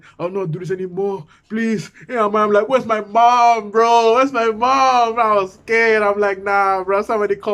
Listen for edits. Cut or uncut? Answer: uncut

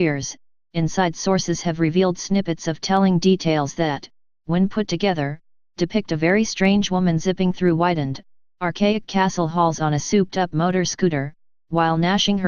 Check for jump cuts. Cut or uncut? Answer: uncut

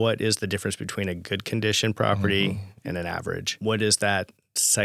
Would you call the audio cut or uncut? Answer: cut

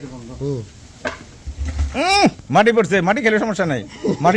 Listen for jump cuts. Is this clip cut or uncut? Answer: uncut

